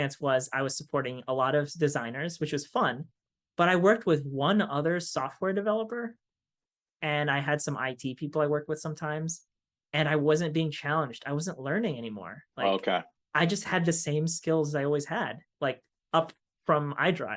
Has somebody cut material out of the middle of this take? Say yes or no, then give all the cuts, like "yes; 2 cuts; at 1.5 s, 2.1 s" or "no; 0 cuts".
no; 0 cuts